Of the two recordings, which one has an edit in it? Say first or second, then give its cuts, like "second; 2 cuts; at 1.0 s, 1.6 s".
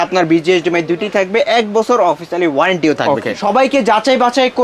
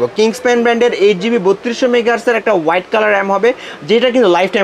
first; 1 cut; at 3.4 s